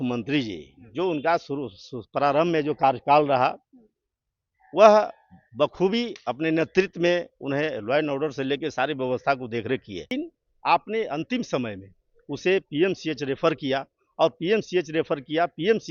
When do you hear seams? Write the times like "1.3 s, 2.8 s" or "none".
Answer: 10.1 s